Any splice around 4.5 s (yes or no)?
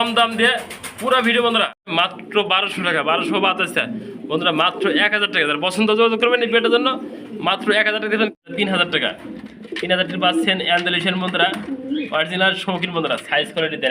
no